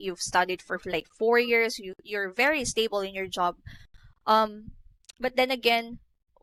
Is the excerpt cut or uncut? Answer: uncut